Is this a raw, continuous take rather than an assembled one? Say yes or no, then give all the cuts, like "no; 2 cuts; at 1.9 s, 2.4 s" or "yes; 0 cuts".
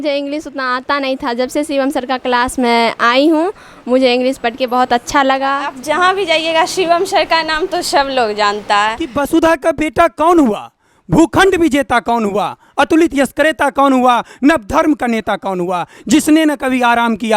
no; 2 cuts; at 5.7 s, 9.0 s